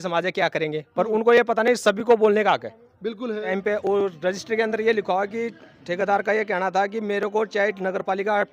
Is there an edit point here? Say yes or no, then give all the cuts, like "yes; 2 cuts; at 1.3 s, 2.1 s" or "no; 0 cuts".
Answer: yes; 1 cut; at 3.5 s